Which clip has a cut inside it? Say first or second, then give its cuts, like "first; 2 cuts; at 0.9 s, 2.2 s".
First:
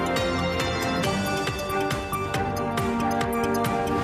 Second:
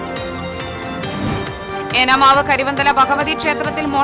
first; 1 cut; at 1.0 s